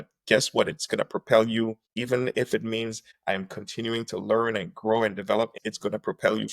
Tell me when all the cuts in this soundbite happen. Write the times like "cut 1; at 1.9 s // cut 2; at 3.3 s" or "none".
cut 1; at 1.9 s // cut 2; at 5.5 s